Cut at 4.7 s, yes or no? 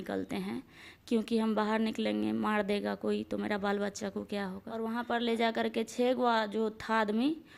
yes